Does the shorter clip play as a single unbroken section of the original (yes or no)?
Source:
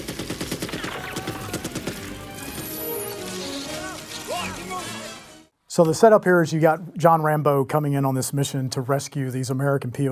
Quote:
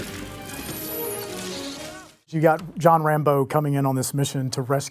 no